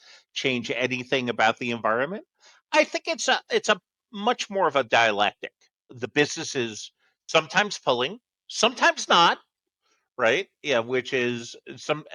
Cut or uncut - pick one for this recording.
uncut